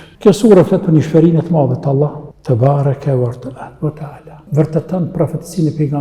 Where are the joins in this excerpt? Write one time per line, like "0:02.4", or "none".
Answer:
0:02.3
0:04.3